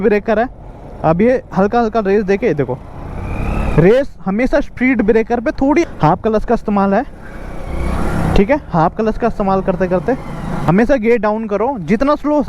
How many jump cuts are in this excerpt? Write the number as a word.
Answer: two